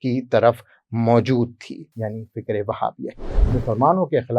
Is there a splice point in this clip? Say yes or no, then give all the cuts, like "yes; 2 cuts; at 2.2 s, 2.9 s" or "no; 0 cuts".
yes; 1 cut; at 3.4 s